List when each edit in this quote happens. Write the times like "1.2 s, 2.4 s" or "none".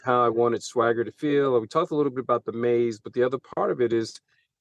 none